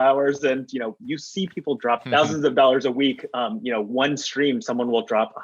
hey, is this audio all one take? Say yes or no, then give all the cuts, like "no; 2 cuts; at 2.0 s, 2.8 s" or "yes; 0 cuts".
no; 1 cut; at 2.0 s